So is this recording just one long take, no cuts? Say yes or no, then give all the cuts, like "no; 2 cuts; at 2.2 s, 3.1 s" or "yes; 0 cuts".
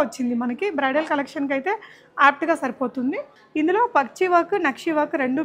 no; 1 cut; at 3.4 s